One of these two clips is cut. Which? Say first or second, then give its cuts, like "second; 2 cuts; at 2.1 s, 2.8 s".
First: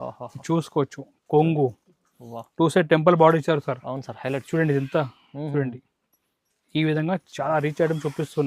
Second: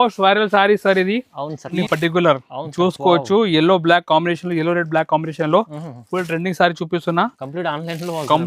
second; 1 cut; at 1.8 s